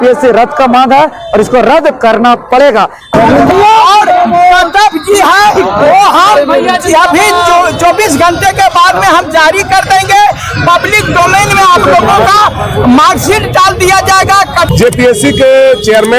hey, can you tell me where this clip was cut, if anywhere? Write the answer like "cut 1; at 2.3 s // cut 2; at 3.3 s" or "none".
cut 1; at 3.1 s // cut 2; at 14.7 s